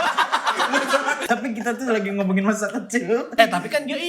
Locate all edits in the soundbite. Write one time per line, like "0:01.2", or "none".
0:01.2
0:03.4